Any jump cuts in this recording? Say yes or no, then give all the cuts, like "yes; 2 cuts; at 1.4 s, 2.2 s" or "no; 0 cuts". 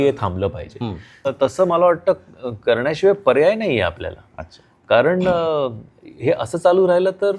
yes; 1 cut; at 1.3 s